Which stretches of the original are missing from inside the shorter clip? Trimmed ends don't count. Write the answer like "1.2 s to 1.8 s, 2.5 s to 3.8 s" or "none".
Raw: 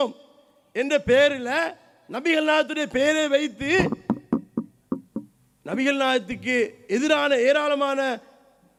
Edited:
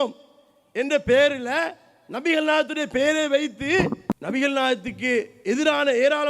4.2 s to 5.7 s